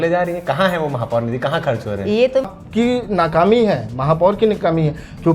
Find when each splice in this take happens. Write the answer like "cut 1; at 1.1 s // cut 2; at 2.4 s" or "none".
cut 1; at 2.5 s

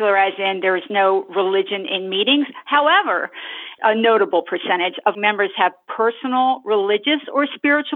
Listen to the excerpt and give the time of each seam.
cut 1; at 3.7 s // cut 2; at 5.2 s

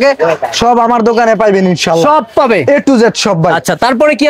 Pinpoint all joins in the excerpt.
none

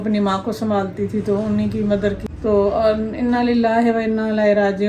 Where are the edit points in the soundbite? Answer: cut 1; at 2.2 s

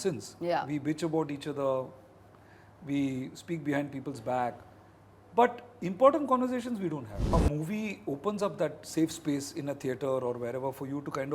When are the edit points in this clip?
cut 1; at 7.1 s

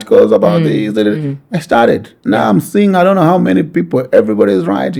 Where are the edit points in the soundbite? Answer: none

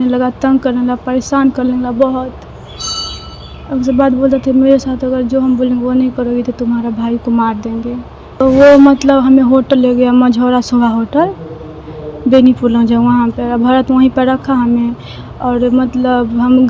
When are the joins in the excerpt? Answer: cut 1; at 8.4 s

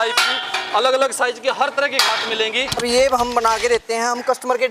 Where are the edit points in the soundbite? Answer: cut 1; at 2.8 s

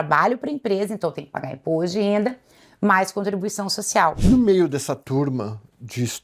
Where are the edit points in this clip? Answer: cut 1; at 4.2 s

